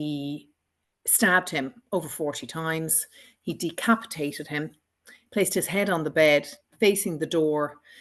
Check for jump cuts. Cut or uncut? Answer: uncut